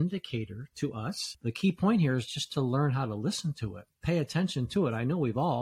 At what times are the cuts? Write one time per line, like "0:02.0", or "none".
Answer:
0:01.3